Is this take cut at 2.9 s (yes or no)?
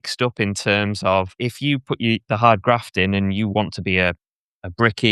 no